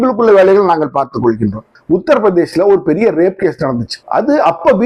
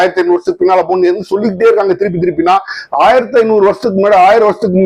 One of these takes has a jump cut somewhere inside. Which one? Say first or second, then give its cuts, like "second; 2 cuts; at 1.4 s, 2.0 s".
first; 1 cut; at 1.7 s